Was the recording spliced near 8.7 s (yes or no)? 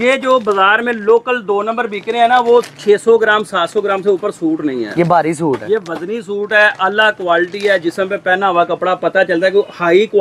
no